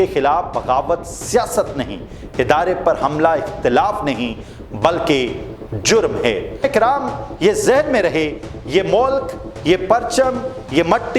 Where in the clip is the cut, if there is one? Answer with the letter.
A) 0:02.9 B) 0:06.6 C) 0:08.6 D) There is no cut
B